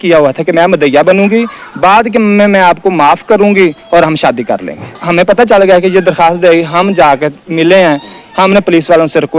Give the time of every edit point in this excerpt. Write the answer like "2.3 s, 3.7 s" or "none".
5.0 s